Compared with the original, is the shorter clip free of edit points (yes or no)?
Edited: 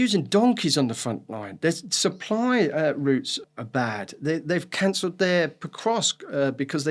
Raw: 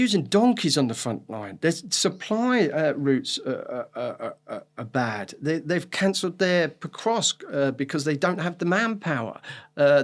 no